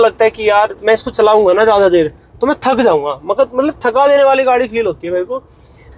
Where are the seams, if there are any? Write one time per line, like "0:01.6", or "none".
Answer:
none